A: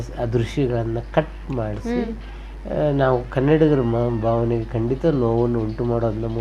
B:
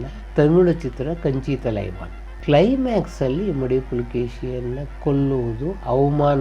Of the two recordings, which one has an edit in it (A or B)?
B